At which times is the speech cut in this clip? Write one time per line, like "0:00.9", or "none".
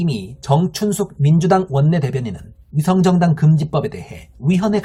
none